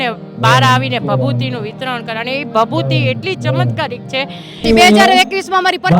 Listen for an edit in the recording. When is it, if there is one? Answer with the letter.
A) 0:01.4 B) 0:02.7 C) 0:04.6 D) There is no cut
C